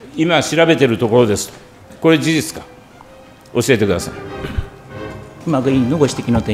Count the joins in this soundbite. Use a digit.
2